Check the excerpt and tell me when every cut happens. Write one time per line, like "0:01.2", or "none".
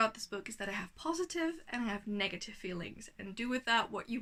none